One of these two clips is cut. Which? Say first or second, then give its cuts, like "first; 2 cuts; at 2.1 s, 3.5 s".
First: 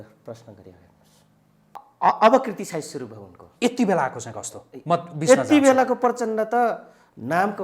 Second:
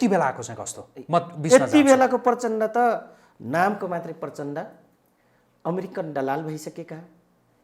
first; 1 cut; at 1.9 s